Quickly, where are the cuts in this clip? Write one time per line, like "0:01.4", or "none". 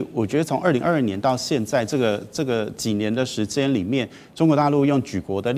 none